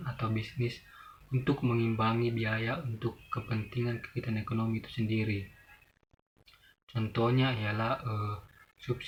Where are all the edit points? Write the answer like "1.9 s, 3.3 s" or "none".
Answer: none